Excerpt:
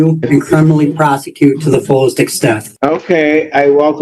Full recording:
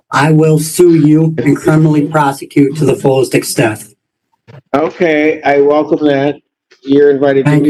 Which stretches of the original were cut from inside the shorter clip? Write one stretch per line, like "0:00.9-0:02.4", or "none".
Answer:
0:03.8-0:04.6